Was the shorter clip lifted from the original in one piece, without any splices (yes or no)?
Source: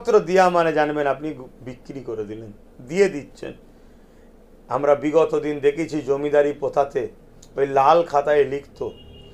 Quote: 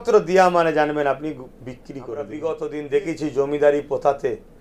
no